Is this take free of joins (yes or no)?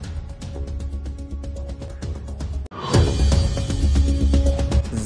no